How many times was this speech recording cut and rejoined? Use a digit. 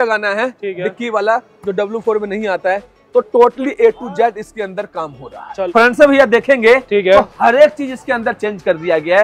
1